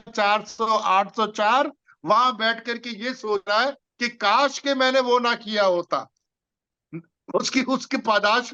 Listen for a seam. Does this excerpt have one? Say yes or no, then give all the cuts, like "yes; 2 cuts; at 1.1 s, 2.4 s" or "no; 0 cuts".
no; 0 cuts